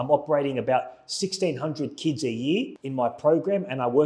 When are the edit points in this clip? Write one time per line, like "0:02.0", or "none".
0:02.8